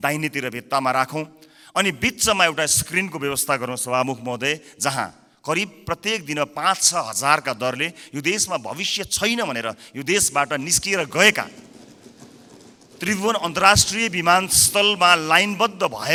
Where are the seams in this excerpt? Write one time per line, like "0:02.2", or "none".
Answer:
none